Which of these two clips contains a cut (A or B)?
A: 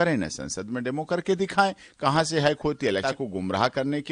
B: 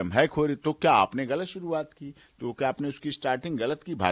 A